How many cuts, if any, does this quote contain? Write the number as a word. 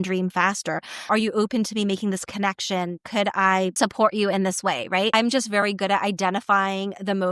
three